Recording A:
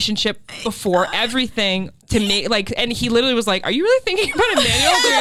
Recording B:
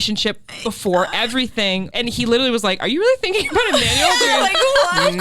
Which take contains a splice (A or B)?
B